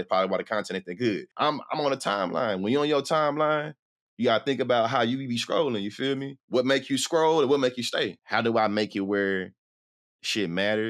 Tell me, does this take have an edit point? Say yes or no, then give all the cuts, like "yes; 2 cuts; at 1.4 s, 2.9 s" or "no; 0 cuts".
yes; 3 cuts; at 1.3 s, 6.3 s, 8.2 s